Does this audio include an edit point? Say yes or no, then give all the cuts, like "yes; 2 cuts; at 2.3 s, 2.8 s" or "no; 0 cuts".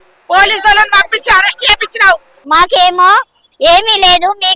yes; 1 cut; at 2.4 s